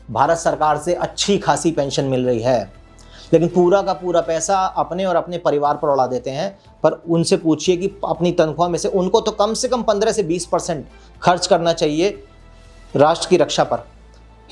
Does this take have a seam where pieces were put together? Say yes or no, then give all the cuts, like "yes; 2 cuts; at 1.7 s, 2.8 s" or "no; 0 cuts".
no; 0 cuts